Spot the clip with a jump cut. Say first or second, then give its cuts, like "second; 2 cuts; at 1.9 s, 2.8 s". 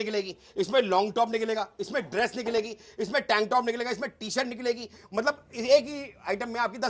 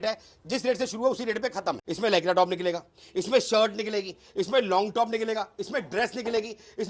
second; 1 cut; at 1.9 s